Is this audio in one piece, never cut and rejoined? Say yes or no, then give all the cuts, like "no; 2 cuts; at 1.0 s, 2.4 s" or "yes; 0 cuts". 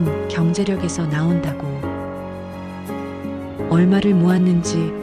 no; 2 cuts; at 1.4 s, 3.3 s